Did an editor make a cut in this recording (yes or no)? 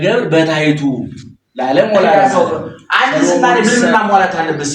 yes